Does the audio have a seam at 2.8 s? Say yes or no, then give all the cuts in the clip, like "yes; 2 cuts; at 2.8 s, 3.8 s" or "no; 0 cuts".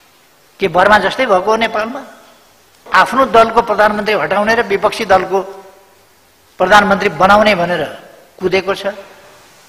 yes; 1 cut; at 2.8 s